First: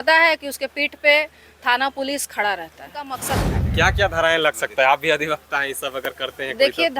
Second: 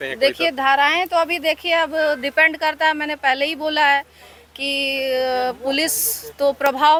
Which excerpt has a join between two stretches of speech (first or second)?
first